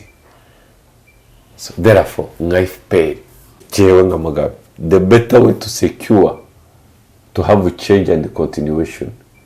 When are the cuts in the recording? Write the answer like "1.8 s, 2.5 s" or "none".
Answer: 3.6 s